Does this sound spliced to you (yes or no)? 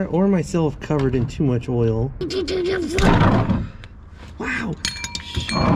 yes